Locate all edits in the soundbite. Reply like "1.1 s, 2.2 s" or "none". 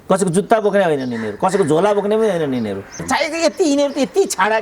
3.0 s